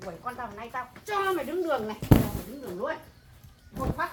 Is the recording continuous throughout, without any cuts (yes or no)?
yes